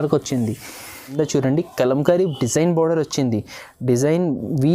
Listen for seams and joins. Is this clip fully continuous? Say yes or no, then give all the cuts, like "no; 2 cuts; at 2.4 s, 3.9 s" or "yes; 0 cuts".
no; 1 cut; at 1.1 s